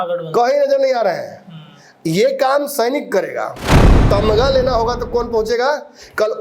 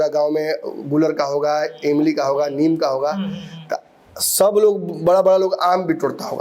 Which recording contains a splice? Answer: first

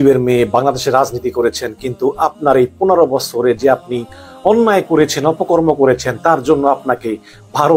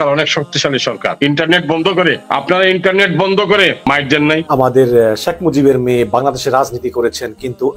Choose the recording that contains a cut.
second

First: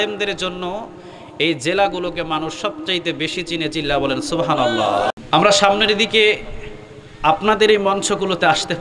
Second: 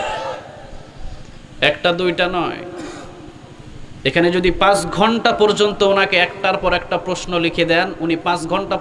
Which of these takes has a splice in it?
first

